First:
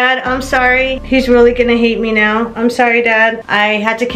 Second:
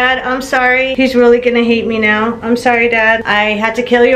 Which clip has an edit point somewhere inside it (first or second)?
second